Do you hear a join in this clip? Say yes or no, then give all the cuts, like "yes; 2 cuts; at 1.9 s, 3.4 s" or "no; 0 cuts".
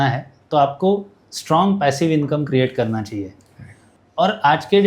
yes; 1 cut; at 3.8 s